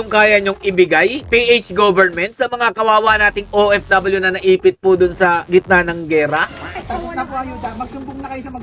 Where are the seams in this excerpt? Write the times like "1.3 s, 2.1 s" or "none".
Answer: 6.8 s